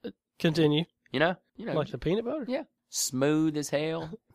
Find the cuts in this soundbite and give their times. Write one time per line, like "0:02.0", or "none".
0:01.5